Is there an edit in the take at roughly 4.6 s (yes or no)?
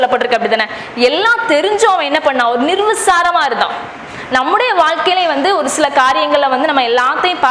no